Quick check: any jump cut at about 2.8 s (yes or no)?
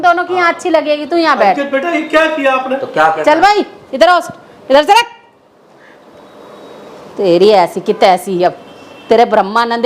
no